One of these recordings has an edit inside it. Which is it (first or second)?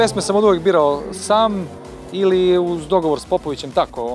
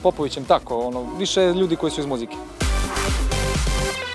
second